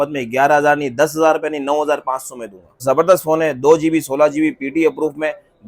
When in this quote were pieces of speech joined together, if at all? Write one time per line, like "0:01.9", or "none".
0:02.8